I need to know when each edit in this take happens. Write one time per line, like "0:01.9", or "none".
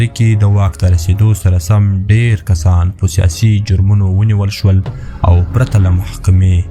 none

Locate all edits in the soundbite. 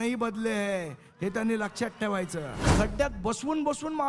0:02.6

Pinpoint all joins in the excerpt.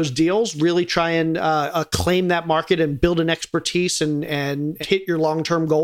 0:04.8

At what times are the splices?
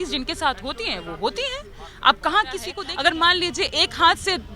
0:02.8

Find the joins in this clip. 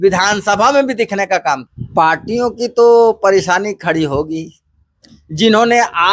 0:01.7

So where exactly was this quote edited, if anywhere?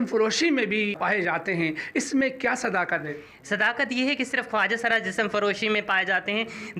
0:01.0

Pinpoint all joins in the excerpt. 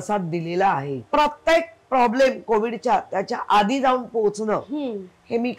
0:01.0

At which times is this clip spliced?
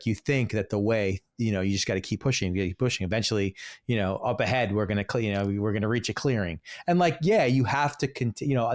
none

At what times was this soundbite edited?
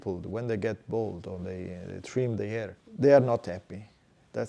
0:02.8

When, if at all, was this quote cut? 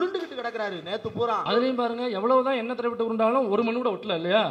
0:01.4

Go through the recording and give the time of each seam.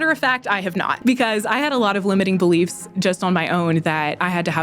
0:00.9

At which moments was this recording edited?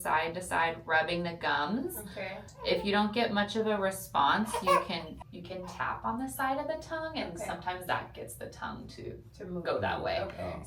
none

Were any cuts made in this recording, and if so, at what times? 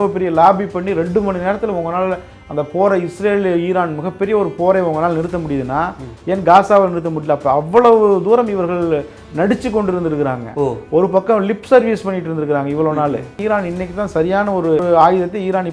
0:13.3
0:14.8

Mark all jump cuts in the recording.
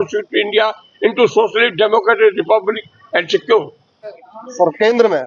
0:04.3

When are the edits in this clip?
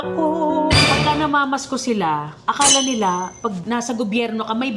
0:00.8
0:03.6

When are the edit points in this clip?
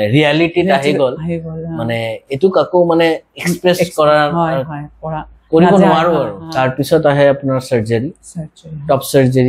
0:06.4

